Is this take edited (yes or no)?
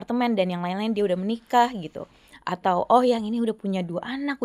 no